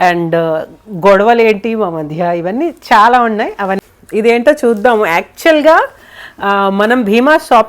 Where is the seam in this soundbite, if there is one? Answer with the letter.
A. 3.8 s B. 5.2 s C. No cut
A